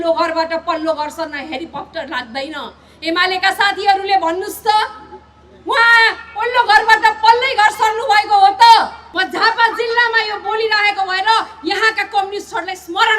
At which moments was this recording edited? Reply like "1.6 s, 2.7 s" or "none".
9.0 s